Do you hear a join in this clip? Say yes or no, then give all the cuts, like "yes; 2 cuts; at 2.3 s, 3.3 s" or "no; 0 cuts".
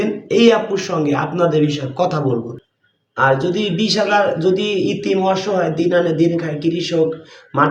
yes; 1 cut; at 2.5 s